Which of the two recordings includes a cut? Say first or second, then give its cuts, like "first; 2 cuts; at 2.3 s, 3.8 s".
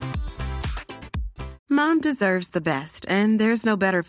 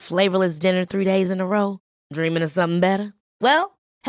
first; 1 cut; at 1.5 s